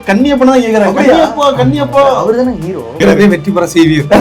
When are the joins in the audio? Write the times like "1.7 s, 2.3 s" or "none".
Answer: 3.0 s